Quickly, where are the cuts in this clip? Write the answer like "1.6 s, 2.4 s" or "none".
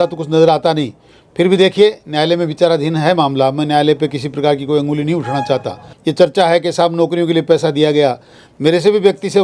5.9 s